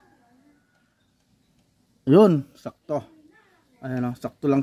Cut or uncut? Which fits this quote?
uncut